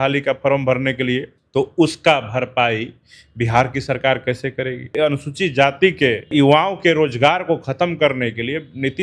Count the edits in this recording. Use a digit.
3